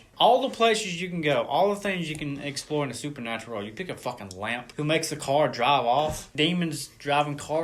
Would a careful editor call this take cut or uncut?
uncut